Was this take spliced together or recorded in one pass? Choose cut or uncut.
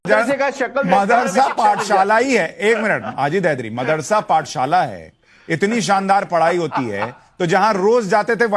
uncut